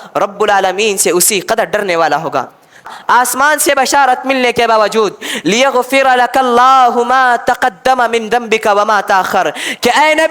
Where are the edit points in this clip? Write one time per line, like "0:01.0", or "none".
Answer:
0:02.9